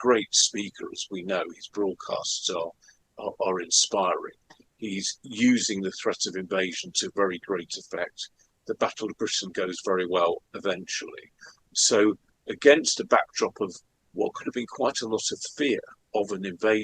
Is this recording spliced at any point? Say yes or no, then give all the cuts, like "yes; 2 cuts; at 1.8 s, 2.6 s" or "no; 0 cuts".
yes; 1 cut; at 16.0 s